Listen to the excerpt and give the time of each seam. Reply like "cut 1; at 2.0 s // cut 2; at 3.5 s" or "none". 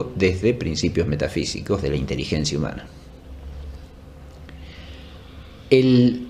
none

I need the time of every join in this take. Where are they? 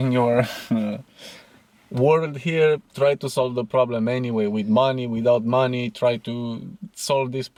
none

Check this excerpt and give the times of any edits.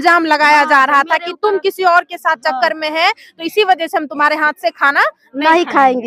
none

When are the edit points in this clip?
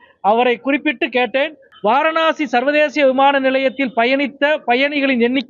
cut 1; at 1.6 s

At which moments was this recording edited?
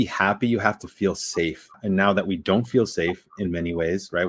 cut 1; at 1.8 s

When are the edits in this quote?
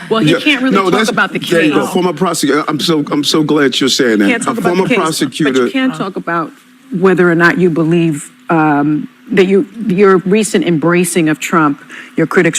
cut 1; at 1.2 s

